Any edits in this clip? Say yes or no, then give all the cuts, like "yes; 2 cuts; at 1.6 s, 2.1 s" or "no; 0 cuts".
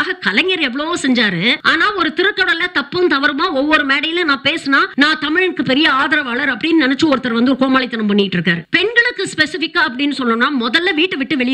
yes; 3 cuts; at 1.6 s, 4.9 s, 8.7 s